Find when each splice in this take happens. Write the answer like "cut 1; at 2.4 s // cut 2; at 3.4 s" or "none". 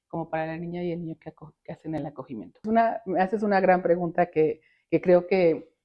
cut 1; at 2.6 s